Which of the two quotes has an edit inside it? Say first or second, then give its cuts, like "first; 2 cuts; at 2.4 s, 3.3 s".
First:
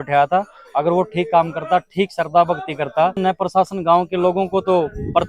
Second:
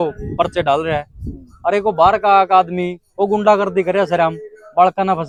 first; 1 cut; at 3.2 s